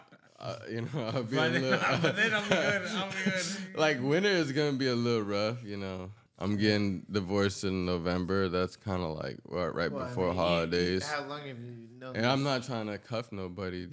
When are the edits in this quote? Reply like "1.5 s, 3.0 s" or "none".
none